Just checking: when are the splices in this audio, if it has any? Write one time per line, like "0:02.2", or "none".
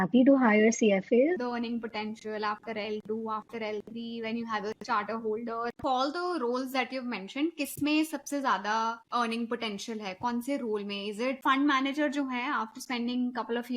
0:01.4
0:05.8
0:09.0
0:11.4